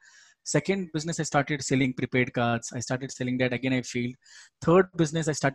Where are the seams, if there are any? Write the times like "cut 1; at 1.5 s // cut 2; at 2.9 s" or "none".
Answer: cut 1; at 1.8 s